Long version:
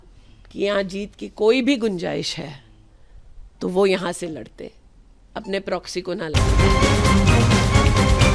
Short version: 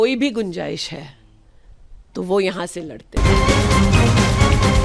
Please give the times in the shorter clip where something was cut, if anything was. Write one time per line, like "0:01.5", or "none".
0:03.2